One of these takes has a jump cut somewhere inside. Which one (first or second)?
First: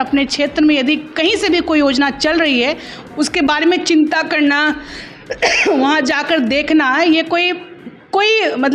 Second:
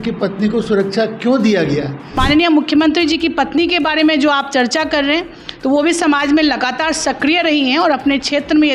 second